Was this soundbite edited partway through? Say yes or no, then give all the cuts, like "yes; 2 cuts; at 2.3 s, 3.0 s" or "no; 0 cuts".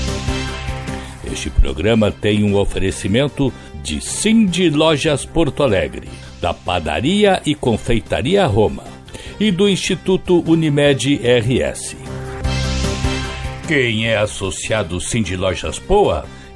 yes; 3 cuts; at 1.3 s, 12.4 s, 13.6 s